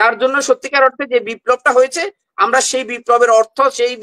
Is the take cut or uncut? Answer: uncut